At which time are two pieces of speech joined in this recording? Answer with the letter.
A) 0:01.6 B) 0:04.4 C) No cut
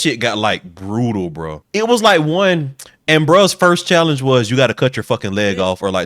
A